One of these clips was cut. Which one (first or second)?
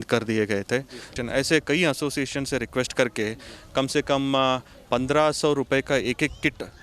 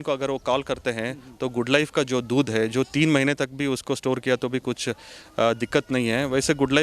first